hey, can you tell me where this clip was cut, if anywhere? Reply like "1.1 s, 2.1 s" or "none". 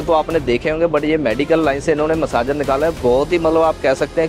none